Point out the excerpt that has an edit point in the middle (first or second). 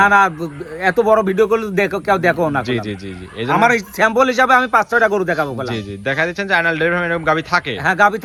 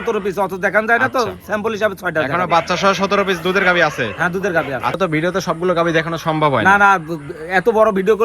second